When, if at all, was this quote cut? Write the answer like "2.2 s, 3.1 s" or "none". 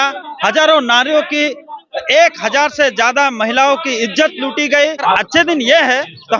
5.0 s